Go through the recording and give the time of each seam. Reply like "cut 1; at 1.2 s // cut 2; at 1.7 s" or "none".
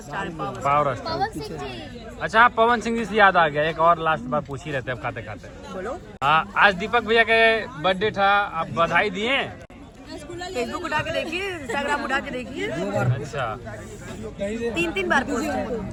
none